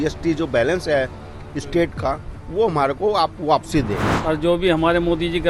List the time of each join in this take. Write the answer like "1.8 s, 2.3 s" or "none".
4.1 s